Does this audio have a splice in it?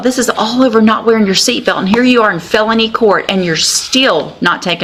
no; 0 cuts

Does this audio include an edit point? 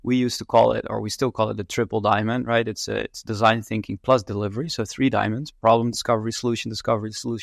no; 0 cuts

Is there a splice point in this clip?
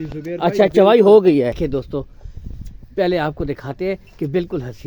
yes; 1 cut; at 1.6 s

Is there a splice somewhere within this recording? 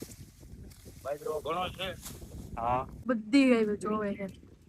yes; 1 cut; at 2.9 s

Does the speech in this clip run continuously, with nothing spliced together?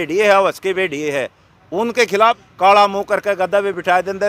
no; 1 cut; at 2.5 s

